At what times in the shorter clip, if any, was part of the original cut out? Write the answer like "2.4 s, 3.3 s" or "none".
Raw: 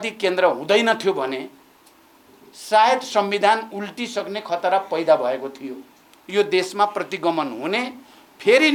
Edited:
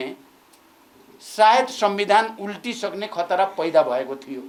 none